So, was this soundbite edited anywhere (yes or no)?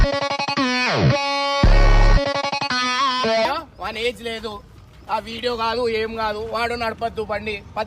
yes